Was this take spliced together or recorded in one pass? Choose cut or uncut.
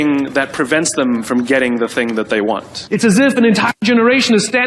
cut